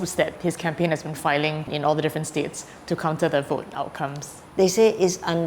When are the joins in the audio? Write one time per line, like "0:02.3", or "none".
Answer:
0:04.3